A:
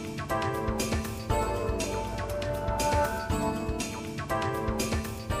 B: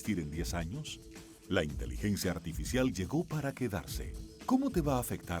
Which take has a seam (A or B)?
A